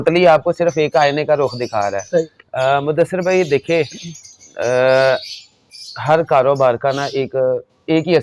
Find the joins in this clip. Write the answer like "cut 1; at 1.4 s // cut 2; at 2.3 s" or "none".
cut 1; at 2.4 s